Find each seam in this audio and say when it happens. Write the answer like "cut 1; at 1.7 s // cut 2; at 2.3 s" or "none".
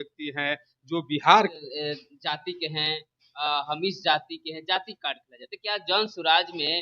cut 1; at 1.5 s